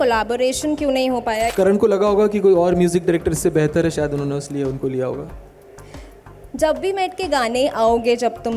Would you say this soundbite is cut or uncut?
cut